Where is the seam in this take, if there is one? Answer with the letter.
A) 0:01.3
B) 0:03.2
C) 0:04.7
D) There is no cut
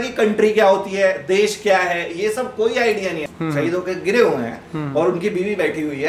B